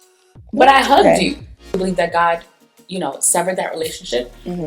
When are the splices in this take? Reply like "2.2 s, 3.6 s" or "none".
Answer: 1.7 s